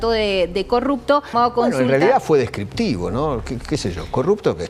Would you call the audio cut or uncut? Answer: cut